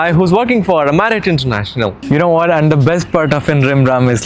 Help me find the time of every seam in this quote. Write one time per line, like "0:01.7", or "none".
0:02.0